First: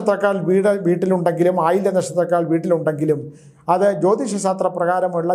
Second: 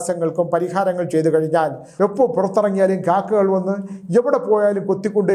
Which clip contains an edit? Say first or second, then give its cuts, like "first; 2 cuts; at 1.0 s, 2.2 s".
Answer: second; 1 cut; at 1.8 s